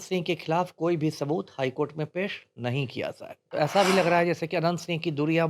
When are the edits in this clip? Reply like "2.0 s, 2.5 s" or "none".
3.5 s

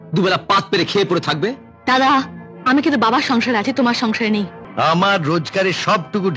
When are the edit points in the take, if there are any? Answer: 4.6 s

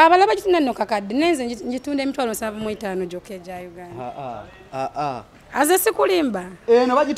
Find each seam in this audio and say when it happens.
none

